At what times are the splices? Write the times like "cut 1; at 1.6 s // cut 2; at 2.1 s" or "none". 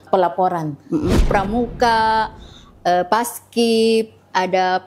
cut 1; at 1.2 s